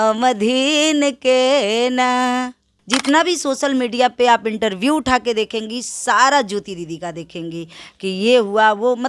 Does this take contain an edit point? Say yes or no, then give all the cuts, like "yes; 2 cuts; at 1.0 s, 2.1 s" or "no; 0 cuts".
yes; 1 cut; at 2.7 s